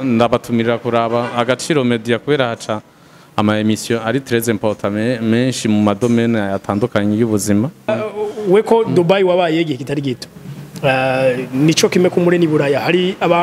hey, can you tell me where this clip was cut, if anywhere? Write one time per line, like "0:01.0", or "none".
0:07.9

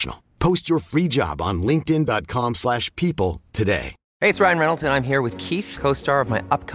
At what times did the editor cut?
0:04.0

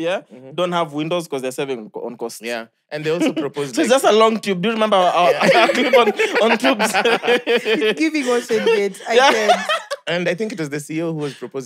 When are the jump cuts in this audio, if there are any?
none

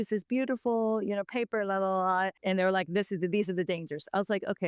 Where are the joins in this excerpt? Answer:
0:02.4

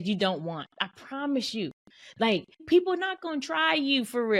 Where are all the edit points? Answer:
0:02.6

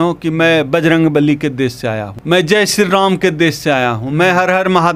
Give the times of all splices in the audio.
0:02.1

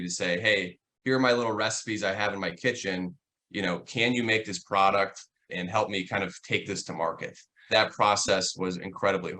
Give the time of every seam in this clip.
0:05.5
0:07.6

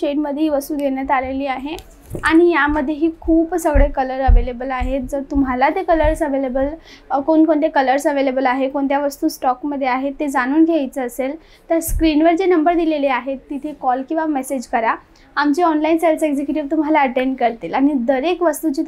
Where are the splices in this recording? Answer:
none

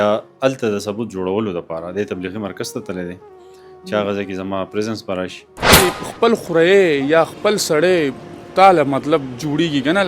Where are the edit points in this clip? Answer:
0:05.8

